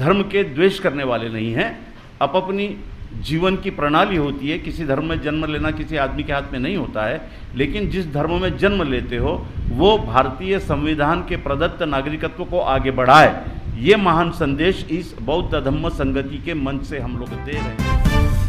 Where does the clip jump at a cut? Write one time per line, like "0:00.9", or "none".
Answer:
0:17.4